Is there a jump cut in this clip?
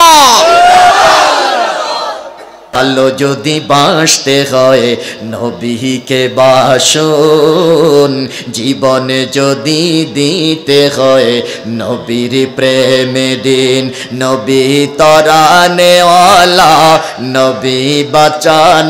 yes; 1 cut; at 2.7 s

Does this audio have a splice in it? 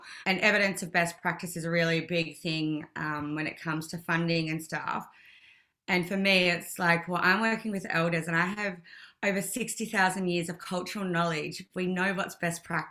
no; 0 cuts

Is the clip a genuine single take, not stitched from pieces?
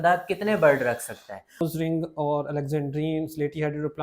no; 1 cut; at 1.6 s

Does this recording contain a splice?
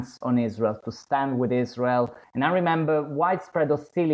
yes; 1 cut; at 2.2 s

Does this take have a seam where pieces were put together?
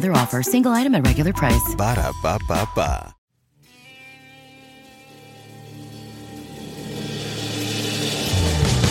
yes; 1 cut; at 3.1 s

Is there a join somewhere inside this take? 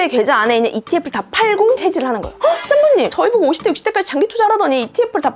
no; 0 cuts

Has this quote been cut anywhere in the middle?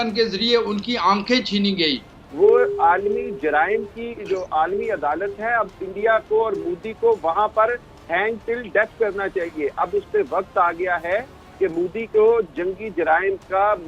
yes; 1 cut; at 2.2 s

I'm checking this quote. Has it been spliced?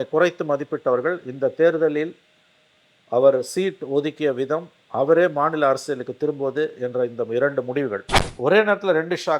yes; 1 cut; at 8.0 s

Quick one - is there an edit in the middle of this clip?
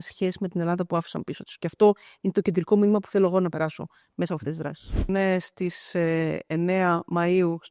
yes; 1 cut; at 5.1 s

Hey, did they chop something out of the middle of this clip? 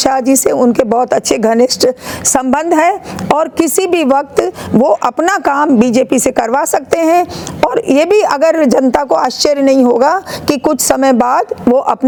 no; 0 cuts

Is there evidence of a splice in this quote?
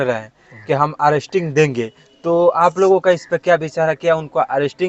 no; 0 cuts

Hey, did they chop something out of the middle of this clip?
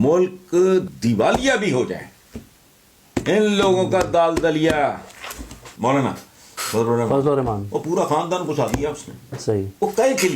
yes; 2 cuts; at 0.9 s, 5.7 s

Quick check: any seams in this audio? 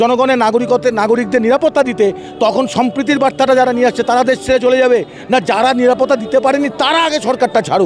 no; 0 cuts

